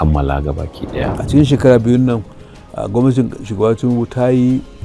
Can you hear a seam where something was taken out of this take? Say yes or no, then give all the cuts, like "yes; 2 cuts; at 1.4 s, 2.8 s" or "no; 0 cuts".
yes; 1 cut; at 1.2 s